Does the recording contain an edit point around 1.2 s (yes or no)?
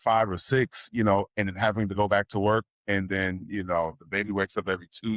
no